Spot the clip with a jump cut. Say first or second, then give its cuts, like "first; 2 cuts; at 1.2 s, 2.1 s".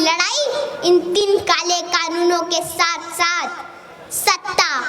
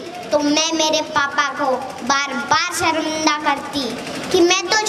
first; 1 cut; at 1.2 s